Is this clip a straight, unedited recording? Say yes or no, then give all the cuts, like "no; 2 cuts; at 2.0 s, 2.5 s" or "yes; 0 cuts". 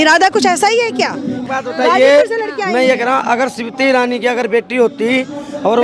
no; 1 cut; at 1.4 s